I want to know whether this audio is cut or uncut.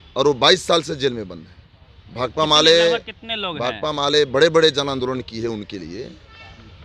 uncut